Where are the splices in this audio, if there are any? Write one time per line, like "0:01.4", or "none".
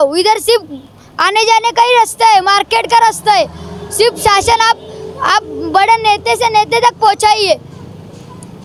none